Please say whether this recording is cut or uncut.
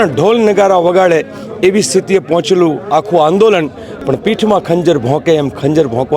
cut